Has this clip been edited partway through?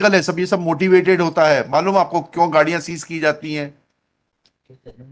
no; 0 cuts

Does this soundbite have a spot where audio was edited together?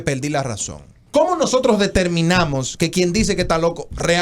yes; 1 cut; at 1.0 s

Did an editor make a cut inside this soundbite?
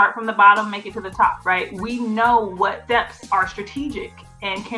yes; 2 cuts; at 1.4 s, 3.2 s

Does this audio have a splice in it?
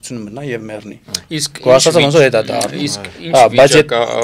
no; 0 cuts

